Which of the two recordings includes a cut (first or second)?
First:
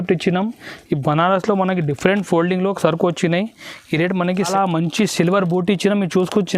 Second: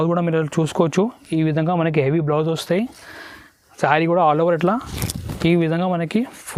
first